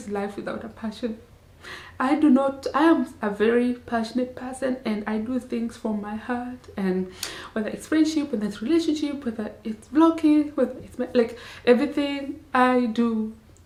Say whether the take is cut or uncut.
uncut